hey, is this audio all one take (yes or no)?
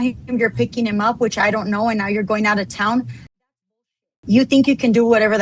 yes